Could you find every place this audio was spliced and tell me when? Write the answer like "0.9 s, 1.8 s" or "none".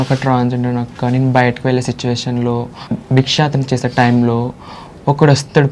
2.9 s